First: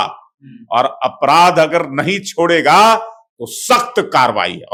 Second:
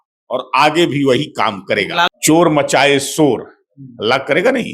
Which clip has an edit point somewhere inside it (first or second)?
second